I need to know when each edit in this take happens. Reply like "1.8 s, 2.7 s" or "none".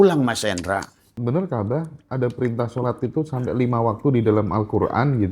1.1 s